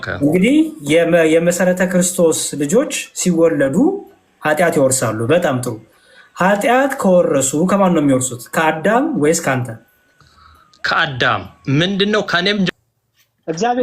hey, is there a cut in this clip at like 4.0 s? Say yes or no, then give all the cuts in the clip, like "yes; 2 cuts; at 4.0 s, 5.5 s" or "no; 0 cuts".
no; 1 cut; at 12.7 s